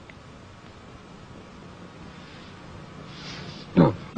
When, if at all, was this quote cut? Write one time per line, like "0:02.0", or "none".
0:02.5